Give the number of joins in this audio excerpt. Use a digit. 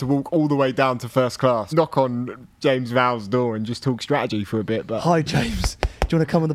2